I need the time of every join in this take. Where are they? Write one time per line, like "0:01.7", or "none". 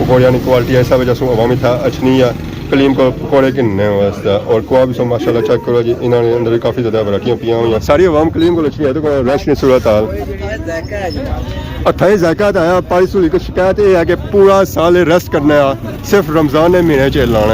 0:07.8

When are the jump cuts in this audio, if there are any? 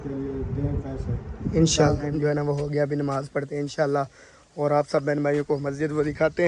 0:02.1

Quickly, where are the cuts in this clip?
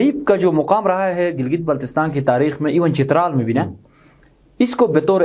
none

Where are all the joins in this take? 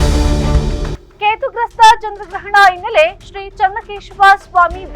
0:01.0

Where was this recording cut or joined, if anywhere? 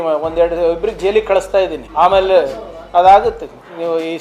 0:01.8

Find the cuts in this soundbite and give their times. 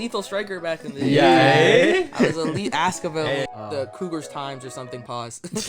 0:03.5

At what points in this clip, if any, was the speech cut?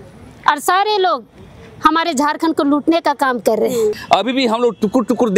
0:04.0

